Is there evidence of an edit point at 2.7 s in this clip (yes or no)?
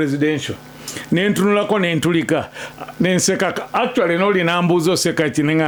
no